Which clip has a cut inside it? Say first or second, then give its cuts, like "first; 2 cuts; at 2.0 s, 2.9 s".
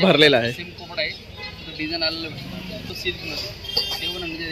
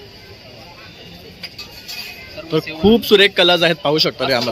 first; 1 cut; at 2.9 s